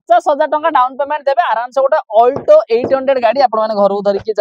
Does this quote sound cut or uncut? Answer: uncut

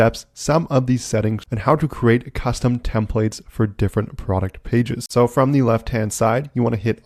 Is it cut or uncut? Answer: uncut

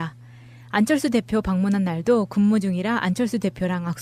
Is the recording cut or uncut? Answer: uncut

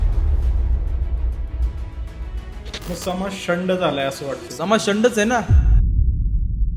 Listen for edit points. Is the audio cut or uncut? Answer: cut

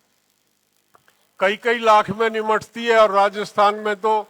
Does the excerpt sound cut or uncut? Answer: uncut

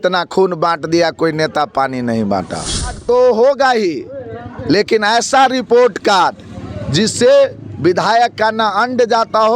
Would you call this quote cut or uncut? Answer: cut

